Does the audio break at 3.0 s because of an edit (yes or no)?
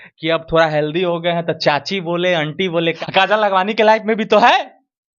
yes